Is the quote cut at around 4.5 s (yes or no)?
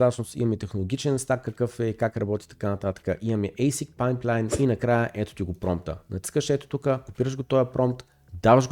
yes